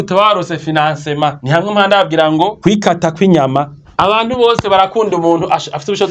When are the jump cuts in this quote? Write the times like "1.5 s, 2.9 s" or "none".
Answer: 1.4 s, 2.6 s, 3.8 s